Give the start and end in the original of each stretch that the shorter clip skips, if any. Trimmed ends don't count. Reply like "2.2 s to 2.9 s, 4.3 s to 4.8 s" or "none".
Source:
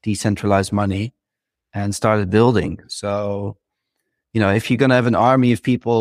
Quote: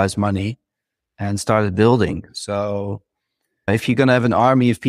4.2 s to 4.5 s

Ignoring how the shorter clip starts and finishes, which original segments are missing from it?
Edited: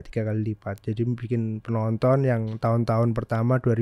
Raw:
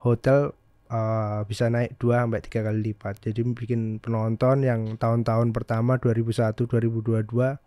none

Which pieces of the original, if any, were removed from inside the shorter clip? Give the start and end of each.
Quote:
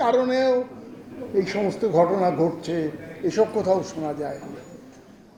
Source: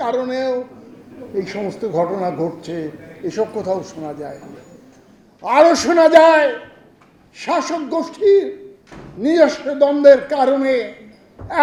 none

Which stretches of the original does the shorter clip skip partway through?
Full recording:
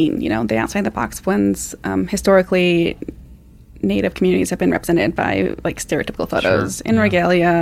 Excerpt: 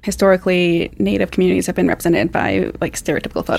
3.0 s to 3.7 s

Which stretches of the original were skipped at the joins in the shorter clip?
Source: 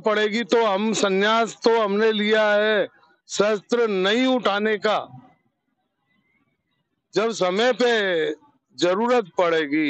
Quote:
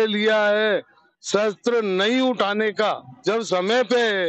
5.1 s to 7.0 s

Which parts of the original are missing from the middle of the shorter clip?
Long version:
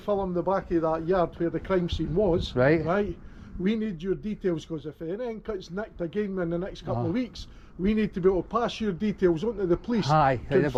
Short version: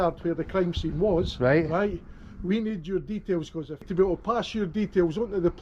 5.0 s to 8.1 s

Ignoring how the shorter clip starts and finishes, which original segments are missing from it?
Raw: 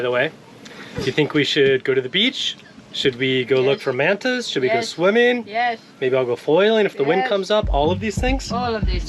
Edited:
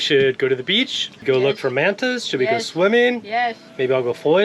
2.7 s to 3.4 s

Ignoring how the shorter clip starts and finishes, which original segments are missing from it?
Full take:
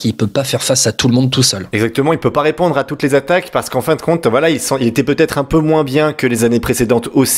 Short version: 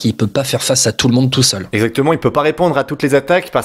none

